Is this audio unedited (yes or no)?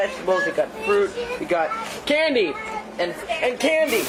yes